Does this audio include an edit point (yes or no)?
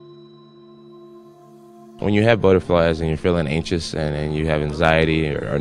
yes